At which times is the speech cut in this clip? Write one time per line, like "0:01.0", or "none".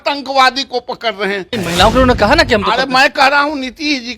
0:01.5